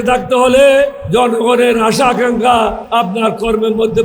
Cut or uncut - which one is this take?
cut